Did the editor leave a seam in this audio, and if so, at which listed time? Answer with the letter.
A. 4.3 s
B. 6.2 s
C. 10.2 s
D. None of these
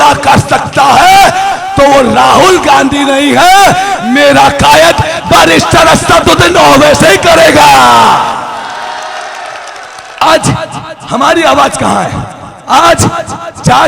C